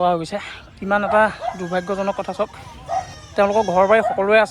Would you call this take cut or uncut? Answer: cut